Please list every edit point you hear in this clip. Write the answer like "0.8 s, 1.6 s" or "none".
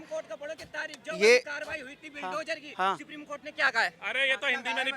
none